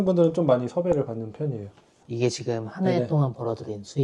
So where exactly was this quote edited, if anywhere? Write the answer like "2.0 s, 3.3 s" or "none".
1.9 s